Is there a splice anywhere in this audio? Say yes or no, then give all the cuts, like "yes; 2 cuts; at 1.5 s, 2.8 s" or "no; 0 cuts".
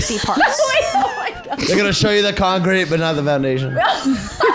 yes; 1 cut; at 1.5 s